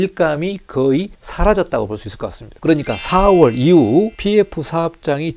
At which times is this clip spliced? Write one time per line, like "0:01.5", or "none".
0:01.2
0:02.5
0:04.2